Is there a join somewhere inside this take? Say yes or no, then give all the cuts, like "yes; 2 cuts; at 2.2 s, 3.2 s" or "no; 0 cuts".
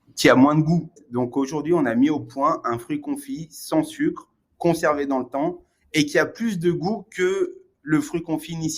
yes; 1 cut; at 1.0 s